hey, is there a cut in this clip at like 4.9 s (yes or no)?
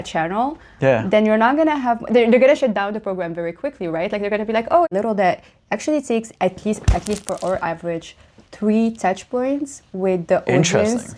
yes